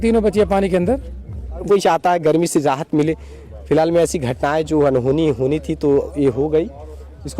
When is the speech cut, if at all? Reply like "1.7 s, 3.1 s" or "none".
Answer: 1.6 s